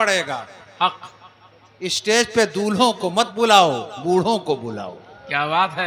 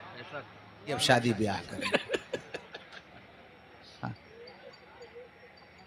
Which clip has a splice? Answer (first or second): second